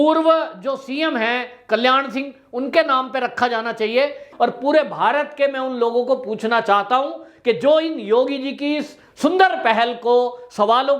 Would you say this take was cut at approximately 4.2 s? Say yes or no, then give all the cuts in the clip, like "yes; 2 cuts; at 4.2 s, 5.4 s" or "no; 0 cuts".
yes; 1 cut; at 4.2 s